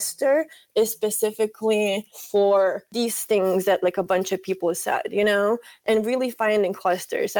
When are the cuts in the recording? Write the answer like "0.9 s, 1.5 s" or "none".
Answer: 2.1 s, 2.8 s, 5.8 s